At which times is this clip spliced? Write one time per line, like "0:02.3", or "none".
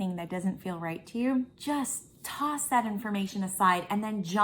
0:01.6

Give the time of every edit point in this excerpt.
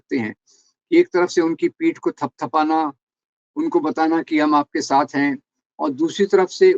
none

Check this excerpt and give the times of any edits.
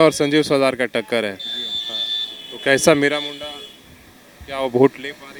none

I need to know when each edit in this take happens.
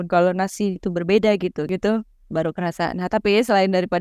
0:01.7

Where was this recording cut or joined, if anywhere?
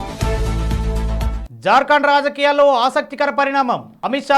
0:01.4

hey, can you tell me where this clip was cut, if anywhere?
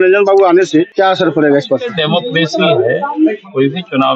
0:00.9
0:01.9

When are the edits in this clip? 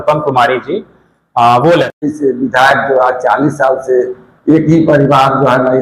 0:01.9

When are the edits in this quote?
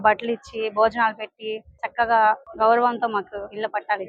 none

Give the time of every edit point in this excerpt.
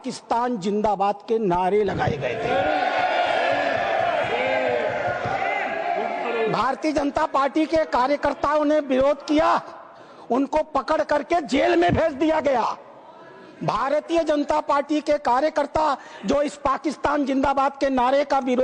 none

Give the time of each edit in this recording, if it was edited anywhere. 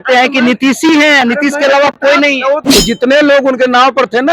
0:02.6

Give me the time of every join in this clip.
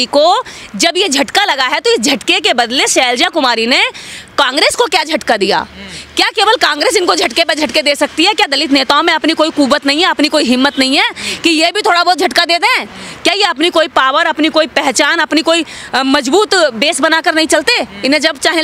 none

